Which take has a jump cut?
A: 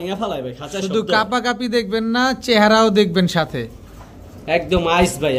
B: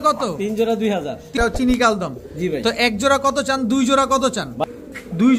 B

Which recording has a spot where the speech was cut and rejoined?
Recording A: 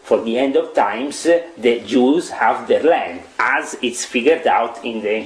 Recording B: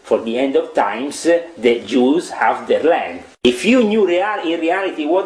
B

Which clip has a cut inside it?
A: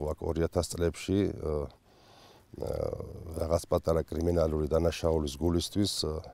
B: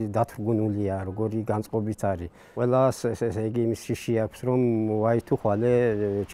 B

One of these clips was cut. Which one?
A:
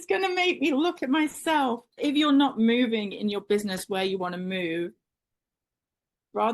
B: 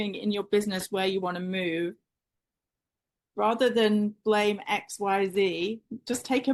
A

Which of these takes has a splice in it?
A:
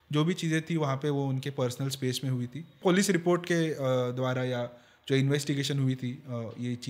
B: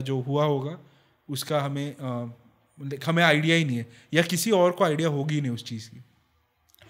A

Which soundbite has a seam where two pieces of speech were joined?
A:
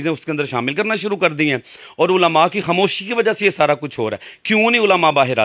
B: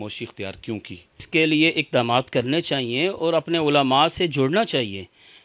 B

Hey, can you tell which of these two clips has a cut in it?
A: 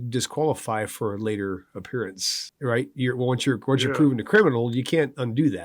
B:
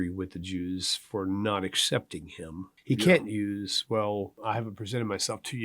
B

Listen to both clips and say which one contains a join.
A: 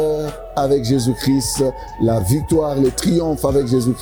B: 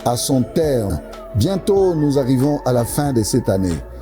B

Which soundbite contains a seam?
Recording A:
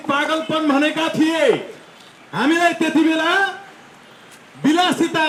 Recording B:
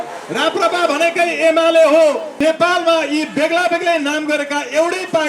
B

